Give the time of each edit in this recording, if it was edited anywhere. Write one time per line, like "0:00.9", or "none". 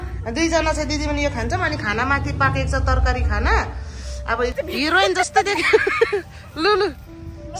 0:04.5